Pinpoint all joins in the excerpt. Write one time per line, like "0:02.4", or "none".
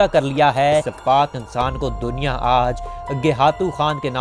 0:00.9